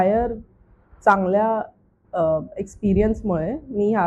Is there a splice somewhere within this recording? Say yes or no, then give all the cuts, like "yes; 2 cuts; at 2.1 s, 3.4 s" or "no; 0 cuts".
no; 0 cuts